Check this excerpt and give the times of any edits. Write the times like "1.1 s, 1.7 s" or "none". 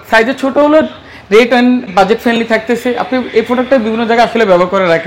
none